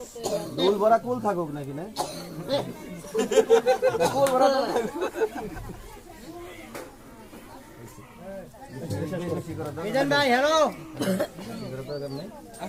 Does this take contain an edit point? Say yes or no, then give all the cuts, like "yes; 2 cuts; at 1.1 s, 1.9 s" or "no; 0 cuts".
no; 0 cuts